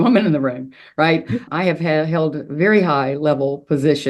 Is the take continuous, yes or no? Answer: no